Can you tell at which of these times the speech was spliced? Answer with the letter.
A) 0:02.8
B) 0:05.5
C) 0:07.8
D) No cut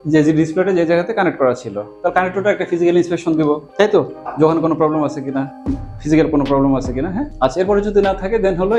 D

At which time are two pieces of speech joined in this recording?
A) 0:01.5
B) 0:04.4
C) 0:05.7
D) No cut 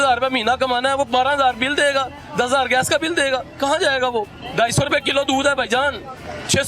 B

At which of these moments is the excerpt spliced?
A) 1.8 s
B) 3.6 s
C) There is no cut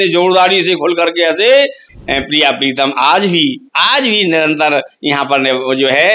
A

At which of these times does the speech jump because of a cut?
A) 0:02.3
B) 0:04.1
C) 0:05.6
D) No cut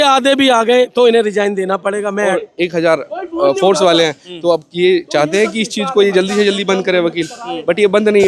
A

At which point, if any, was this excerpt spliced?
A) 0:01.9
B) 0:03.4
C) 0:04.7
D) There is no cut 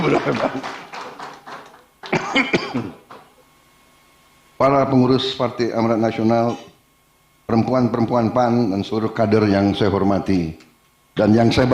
D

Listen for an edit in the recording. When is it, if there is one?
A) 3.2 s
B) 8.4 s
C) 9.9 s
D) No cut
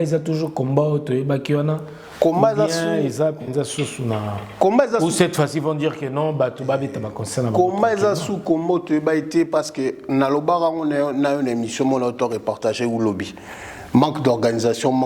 D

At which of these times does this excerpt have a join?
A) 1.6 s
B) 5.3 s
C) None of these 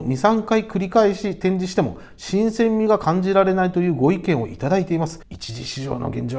B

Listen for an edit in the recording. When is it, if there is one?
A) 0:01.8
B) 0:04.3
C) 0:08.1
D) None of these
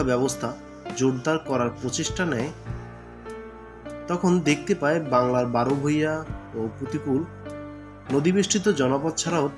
D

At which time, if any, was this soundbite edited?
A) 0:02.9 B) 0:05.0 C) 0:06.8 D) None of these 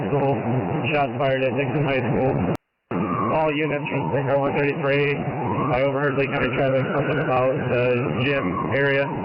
D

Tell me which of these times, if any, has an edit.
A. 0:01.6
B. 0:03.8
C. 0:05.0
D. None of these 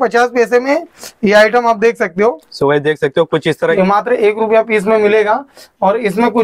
B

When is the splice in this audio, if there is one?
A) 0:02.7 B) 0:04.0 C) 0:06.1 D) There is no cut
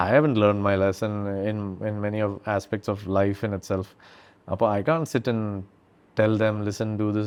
D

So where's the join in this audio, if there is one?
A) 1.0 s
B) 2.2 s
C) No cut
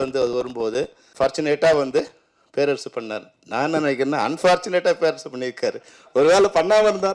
A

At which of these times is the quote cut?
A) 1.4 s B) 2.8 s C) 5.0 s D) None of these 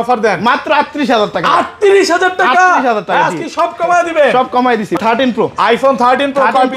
C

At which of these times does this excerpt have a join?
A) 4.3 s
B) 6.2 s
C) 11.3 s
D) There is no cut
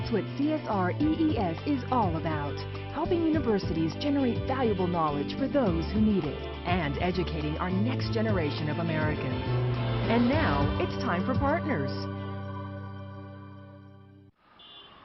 B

